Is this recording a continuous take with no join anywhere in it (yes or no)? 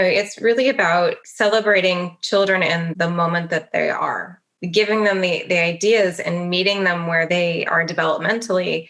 no